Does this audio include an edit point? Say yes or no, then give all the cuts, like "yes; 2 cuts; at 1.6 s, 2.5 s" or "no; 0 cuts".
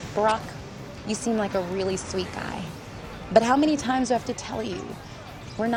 no; 0 cuts